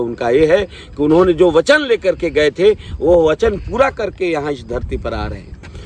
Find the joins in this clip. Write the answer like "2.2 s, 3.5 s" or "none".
none